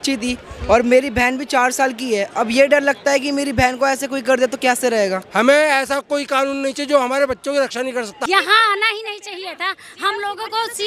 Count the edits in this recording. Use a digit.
2